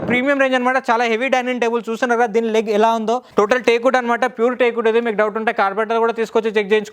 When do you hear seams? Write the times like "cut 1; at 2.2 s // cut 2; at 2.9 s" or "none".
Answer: cut 1; at 3.2 s

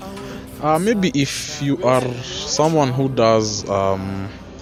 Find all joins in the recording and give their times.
none

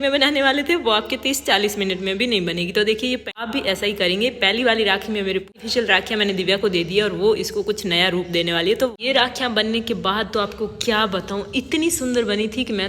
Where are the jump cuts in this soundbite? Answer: cut 1; at 3.4 s // cut 2; at 5.5 s // cut 3; at 8.9 s

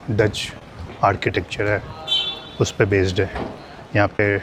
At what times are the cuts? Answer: none

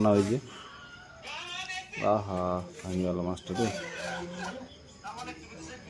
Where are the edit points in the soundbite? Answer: none

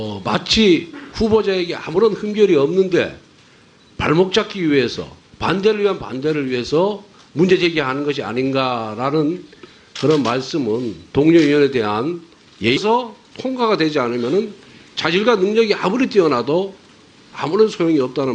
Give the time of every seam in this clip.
none

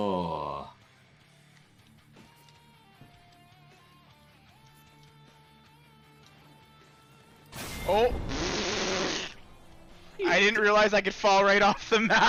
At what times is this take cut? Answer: none

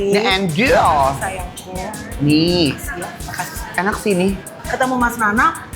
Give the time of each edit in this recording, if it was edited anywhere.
cut 1; at 4.5 s

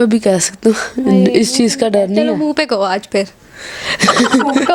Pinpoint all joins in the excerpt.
none

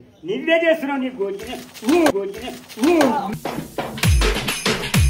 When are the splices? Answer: none

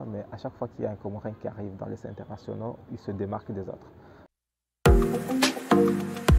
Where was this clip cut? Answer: cut 1; at 4.3 s

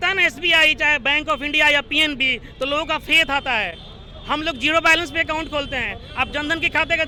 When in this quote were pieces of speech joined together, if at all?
none

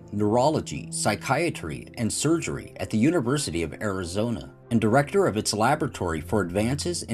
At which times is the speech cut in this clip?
cut 1; at 6.1 s

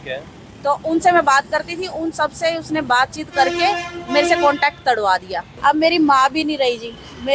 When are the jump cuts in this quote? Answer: cut 1; at 5.5 s

